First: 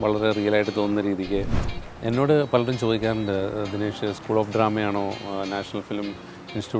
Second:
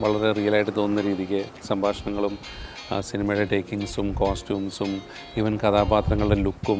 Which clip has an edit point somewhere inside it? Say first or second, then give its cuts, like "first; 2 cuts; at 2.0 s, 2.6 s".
first; 1 cut; at 1.5 s